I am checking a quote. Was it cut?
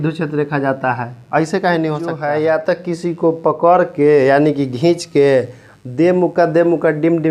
yes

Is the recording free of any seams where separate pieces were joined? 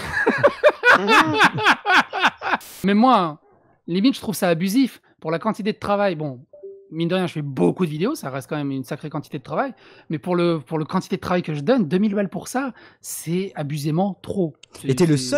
no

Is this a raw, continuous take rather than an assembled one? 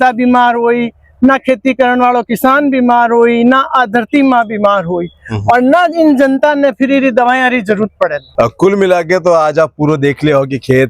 yes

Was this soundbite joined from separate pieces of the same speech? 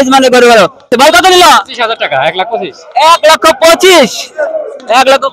yes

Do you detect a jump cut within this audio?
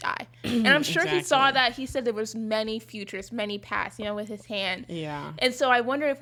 no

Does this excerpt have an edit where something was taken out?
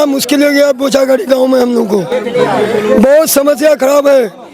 no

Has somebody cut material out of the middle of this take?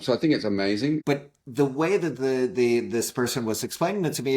yes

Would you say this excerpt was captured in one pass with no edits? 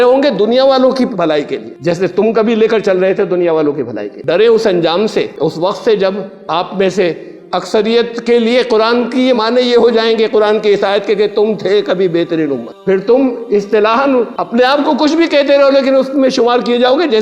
no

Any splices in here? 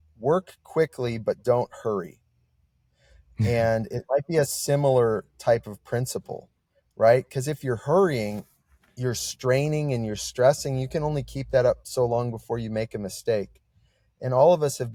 no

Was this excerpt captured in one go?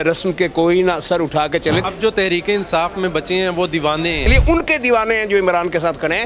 no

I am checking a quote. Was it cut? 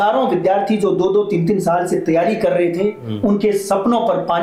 no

